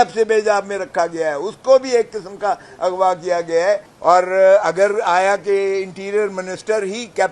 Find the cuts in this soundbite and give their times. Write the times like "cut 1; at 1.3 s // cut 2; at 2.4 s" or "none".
cut 1; at 3.9 s

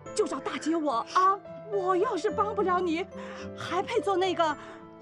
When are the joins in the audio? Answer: cut 1; at 1.5 s

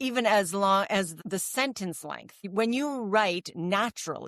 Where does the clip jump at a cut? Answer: cut 1; at 1.1 s // cut 2; at 2.3 s

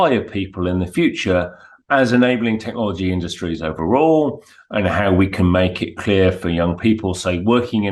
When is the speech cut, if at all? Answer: none

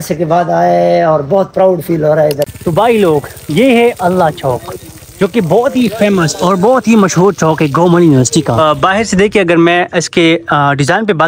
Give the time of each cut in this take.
cut 1; at 2.5 s // cut 2; at 8.6 s

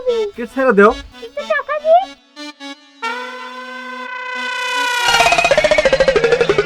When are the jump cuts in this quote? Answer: none

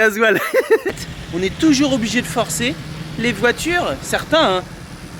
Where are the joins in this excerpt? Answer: cut 1; at 0.9 s

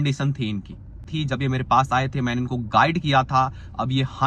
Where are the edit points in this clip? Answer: cut 1; at 1.0 s

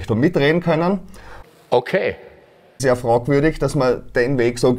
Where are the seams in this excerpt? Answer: cut 1; at 1.4 s // cut 2; at 2.7 s

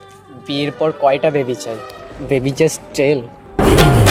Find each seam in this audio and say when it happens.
none

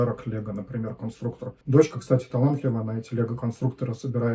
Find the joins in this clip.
cut 1; at 1.5 s

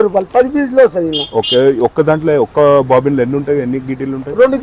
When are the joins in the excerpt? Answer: none

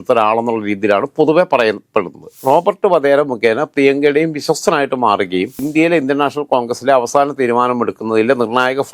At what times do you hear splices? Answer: cut 1; at 2.3 s

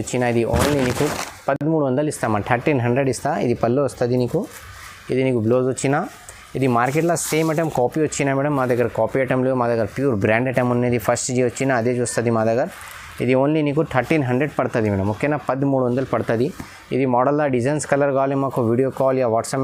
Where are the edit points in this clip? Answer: none

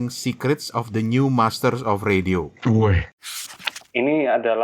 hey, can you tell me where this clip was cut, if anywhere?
cut 1; at 3.6 s

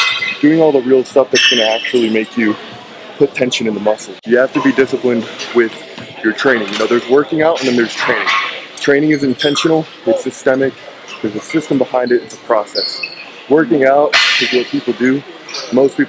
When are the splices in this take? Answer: cut 1; at 4.1 s

